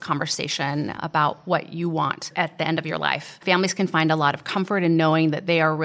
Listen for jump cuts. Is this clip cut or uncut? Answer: cut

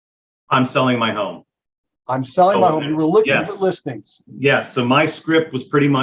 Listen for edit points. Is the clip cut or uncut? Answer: uncut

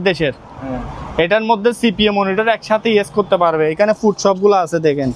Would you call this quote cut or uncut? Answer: uncut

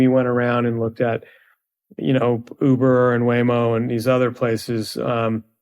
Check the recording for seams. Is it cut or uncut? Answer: uncut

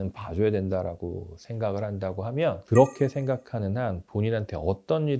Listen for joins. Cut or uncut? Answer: cut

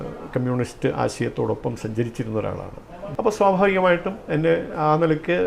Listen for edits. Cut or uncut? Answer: cut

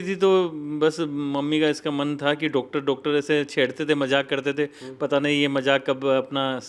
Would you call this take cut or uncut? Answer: uncut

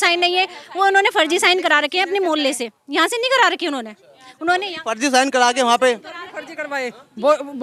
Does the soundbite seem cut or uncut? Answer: uncut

